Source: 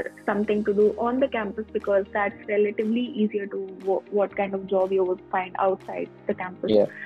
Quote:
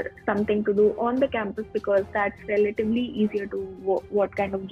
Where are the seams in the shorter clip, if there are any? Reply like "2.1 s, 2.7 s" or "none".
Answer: none

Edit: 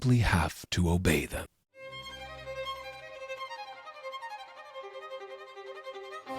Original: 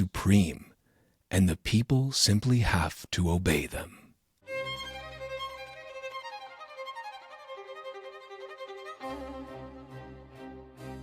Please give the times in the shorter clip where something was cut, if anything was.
2.0 s

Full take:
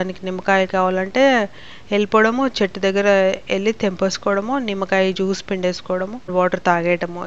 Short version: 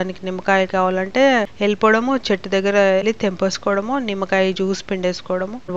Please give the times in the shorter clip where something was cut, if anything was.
1.5 s, 3.0 s

